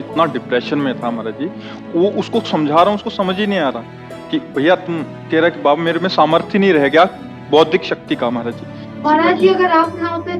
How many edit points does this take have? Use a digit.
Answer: 1